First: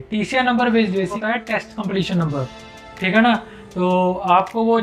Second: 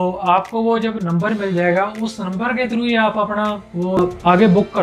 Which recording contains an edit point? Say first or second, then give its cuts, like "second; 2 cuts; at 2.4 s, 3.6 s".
first; 1 cut; at 1.2 s